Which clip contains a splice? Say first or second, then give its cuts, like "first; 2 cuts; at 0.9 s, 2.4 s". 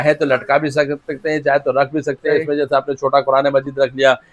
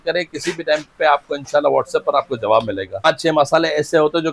second; 1 cut; at 3.1 s